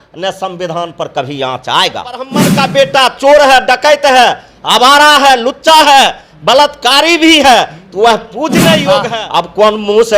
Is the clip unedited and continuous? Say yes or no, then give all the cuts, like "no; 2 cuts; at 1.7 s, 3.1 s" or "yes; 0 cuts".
no; 2 cuts; at 2.5 s, 9.1 s